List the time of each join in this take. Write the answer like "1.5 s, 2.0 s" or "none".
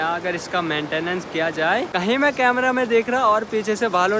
1.9 s